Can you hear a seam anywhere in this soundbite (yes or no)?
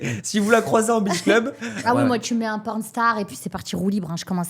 yes